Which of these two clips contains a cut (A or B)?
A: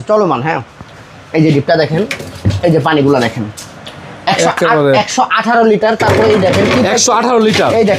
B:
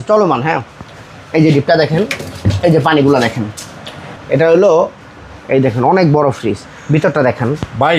B